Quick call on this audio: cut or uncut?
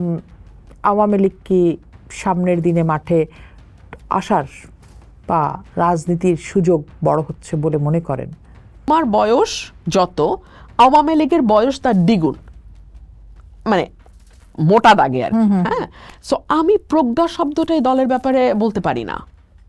cut